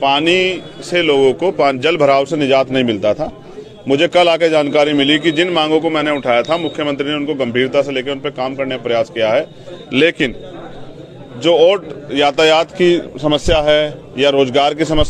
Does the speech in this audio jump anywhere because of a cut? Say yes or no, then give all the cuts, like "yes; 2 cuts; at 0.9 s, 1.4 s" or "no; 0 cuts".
no; 0 cuts